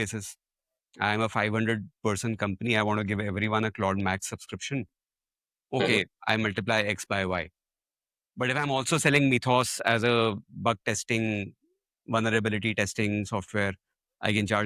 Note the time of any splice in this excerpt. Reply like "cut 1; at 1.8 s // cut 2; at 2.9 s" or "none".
none